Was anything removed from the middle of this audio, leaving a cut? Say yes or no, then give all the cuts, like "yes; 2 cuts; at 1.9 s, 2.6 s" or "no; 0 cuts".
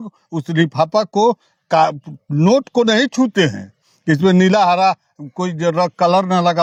no; 0 cuts